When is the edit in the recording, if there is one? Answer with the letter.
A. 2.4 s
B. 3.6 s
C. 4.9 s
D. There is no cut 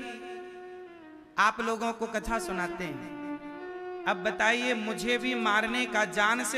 B